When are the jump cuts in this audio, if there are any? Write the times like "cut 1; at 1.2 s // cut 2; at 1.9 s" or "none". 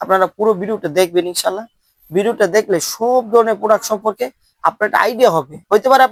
none